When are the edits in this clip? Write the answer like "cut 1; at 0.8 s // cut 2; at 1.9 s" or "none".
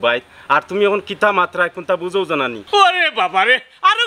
cut 1; at 2.6 s